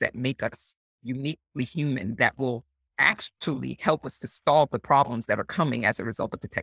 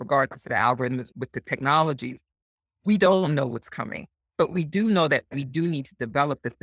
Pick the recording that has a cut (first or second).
second